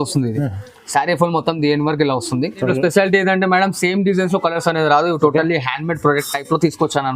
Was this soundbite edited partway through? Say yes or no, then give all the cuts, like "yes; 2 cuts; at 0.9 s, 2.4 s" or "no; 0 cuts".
yes; 1 cut; at 2.6 s